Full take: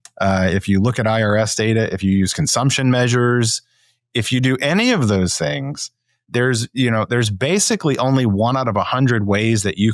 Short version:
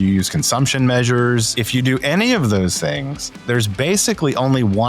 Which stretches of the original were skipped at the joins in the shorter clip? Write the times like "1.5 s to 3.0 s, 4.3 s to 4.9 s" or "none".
3.6 s to 4.1 s, 6.0 s to 7.1 s